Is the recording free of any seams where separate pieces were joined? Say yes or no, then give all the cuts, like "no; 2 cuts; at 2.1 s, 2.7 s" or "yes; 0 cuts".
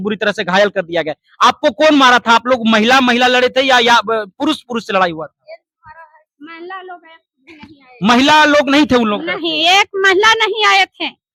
yes; 0 cuts